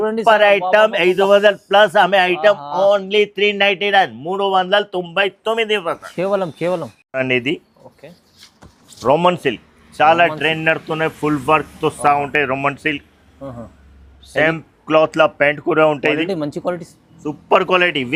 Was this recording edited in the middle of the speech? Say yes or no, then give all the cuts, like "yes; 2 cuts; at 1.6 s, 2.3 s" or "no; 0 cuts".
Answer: no; 0 cuts